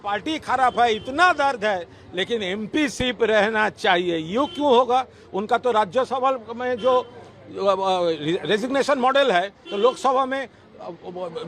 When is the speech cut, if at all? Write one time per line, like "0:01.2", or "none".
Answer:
none